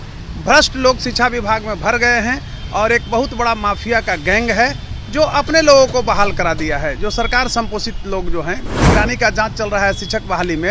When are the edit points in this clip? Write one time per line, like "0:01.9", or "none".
0:08.9